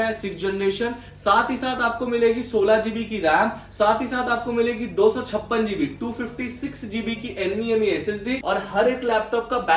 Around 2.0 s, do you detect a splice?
no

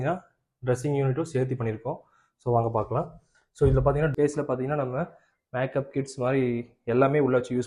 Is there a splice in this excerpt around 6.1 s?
no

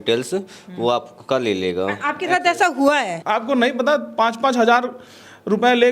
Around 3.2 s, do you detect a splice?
yes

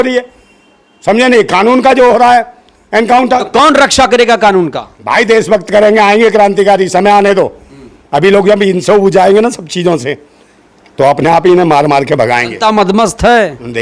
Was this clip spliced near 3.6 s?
no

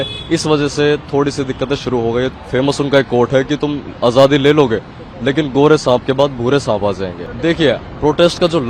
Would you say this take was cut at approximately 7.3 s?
yes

